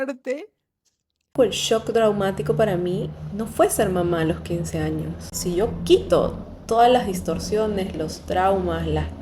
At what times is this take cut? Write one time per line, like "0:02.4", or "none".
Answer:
0:01.3
0:05.3